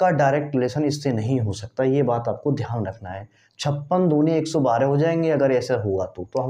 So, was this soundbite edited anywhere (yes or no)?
no